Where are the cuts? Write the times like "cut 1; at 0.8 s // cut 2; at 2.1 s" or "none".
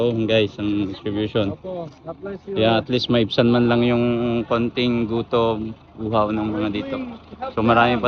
none